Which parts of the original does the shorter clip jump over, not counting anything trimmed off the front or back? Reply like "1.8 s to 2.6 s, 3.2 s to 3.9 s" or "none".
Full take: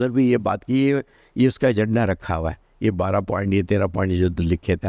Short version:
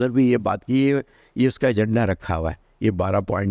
none

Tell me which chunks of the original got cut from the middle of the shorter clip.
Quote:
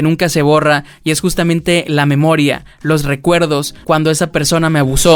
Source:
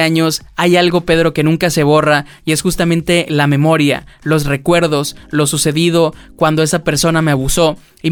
5.1 s to 6.3 s

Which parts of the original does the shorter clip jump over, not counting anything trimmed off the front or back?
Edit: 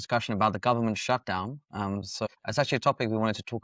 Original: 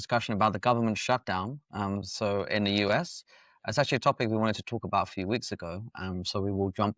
2.3 s to 3.5 s

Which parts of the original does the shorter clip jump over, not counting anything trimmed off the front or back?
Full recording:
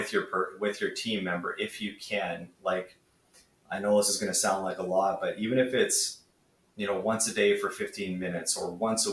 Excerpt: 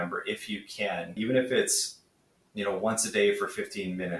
2.5 s to 5.4 s

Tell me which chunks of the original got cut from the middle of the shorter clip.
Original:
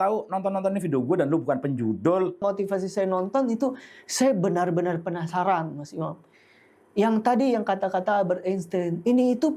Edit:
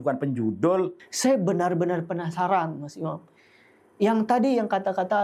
2.4 s to 3.9 s

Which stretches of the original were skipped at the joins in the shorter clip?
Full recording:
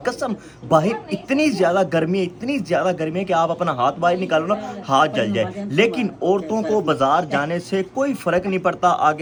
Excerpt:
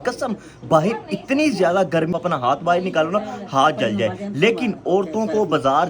2.1 s to 3.5 s

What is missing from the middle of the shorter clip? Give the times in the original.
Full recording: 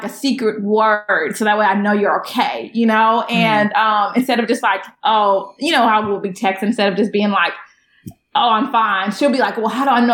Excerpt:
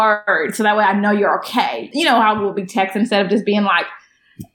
2.6 s to 5.5 s

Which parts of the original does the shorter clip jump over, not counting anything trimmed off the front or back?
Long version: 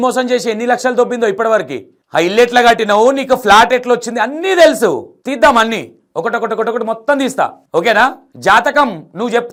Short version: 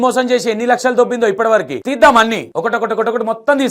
1.8 s to 5.2 s, 5.9 s to 6.1 s

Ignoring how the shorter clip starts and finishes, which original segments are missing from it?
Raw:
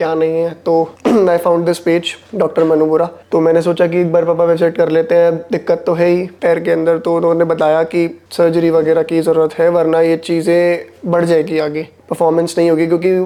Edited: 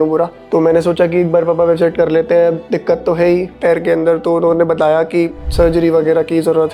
none

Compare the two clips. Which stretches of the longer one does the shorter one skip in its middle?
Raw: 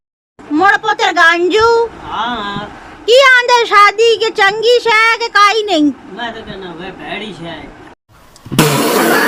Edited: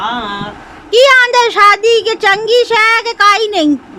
none

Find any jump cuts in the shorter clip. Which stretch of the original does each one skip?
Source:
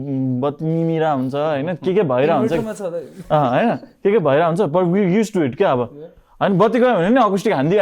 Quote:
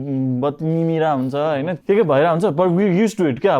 1.7 s to 3.9 s

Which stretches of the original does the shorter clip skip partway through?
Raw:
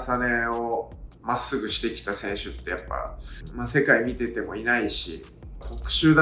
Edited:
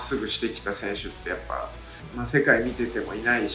none

